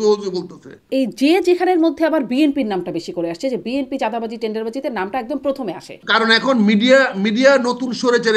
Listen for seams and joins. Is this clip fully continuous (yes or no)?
no